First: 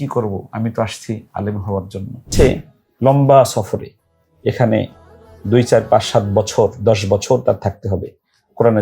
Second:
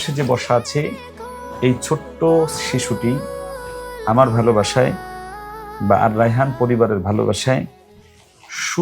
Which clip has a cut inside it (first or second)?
first